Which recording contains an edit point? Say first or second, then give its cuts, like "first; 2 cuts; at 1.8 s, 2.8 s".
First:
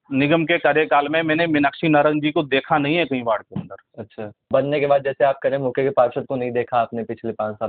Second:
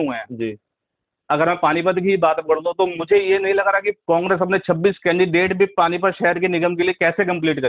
first; 1 cut; at 4.3 s